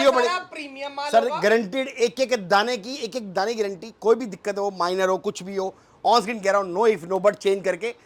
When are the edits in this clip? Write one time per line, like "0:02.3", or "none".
none